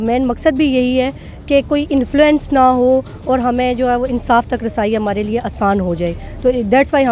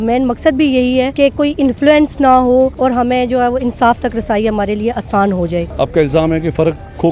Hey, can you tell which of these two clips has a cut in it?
second; 3 cuts; at 1.1 s, 2.7 s, 5.7 s

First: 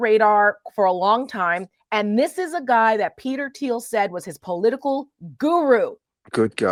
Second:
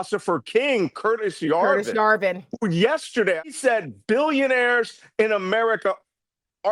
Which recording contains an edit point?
second; 1 cut; at 3.5 s

